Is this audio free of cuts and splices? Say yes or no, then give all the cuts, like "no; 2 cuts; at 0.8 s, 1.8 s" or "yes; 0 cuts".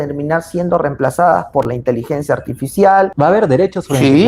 no; 1 cut; at 3.1 s